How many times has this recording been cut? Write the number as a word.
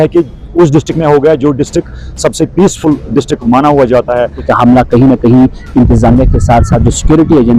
one